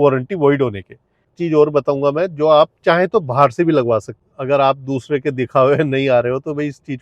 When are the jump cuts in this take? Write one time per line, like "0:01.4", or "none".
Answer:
0:01.3
0:04.2